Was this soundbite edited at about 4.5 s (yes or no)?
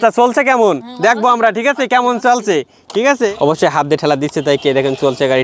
no